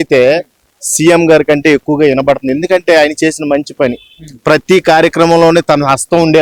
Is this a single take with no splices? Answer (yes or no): yes